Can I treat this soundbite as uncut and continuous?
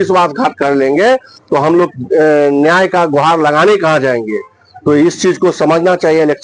yes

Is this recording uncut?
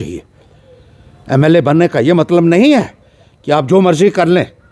yes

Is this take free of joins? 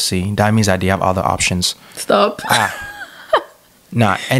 yes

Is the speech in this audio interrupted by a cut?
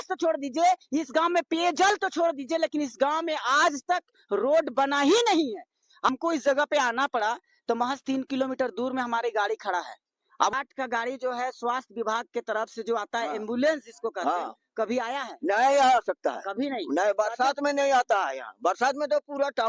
yes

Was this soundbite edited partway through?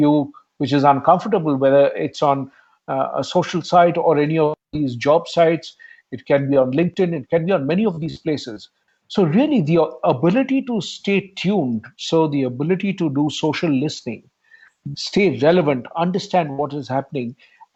no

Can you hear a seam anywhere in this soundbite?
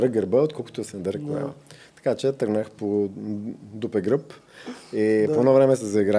no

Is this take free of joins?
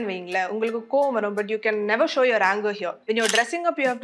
no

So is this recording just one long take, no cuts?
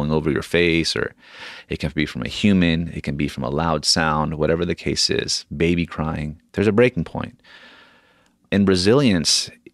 no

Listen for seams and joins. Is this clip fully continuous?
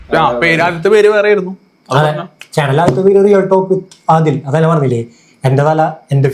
yes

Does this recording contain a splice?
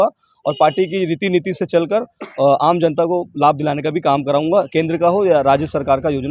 no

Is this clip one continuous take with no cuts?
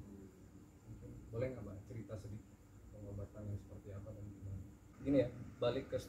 no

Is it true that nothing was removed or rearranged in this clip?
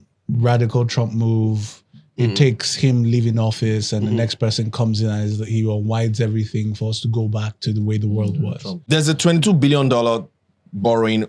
no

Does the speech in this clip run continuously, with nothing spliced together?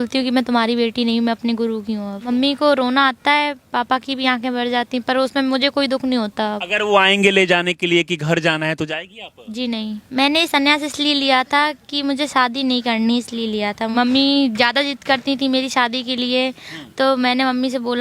no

